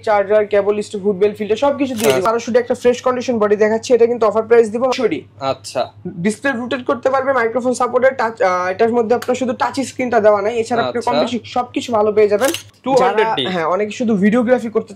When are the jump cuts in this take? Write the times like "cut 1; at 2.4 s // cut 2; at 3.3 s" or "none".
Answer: cut 1; at 2.2 s // cut 2; at 4.9 s // cut 3; at 12.7 s